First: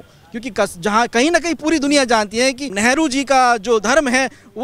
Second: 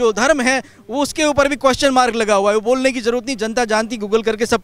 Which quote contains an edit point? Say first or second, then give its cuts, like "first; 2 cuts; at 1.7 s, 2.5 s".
first; 1 cut; at 2.7 s